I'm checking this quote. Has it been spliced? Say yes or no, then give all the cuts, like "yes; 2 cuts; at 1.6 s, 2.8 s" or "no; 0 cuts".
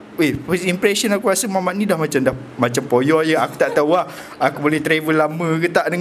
no; 0 cuts